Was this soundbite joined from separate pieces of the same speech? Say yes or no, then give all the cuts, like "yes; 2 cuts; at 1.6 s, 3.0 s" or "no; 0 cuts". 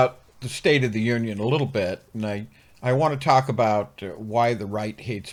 no; 0 cuts